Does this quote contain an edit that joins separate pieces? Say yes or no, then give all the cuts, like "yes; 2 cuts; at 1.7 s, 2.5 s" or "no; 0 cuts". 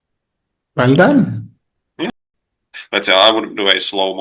yes; 1 cut; at 2.1 s